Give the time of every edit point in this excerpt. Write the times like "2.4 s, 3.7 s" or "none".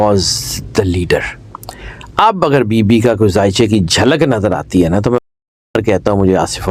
none